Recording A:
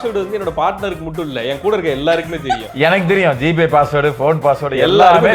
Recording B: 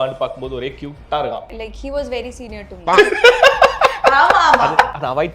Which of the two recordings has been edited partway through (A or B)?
B